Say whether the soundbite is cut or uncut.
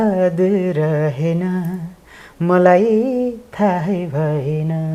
uncut